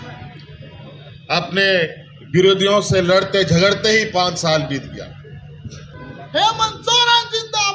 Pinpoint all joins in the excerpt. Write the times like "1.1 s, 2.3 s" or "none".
5.9 s